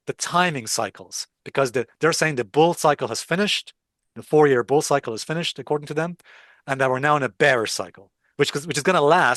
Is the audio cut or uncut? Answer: uncut